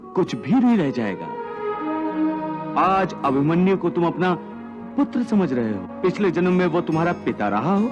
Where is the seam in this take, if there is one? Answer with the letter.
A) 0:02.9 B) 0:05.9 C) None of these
B